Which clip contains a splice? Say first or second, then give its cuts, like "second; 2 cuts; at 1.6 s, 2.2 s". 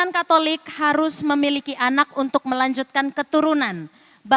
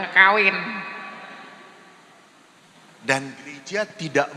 second; 1 cut; at 2.6 s